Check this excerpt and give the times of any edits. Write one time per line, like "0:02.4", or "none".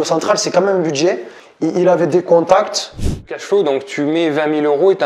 0:01.3
0:03.2